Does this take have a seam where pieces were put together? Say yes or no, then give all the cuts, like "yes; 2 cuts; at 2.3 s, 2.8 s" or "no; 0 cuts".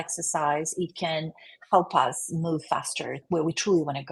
yes; 1 cut; at 3.2 s